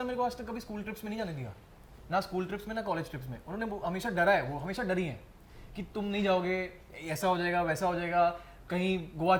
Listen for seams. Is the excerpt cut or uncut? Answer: uncut